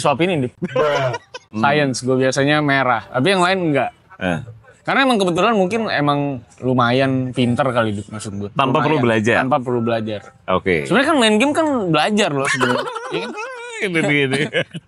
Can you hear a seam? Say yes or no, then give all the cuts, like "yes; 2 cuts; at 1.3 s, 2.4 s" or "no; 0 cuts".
yes; 1 cut; at 1.5 s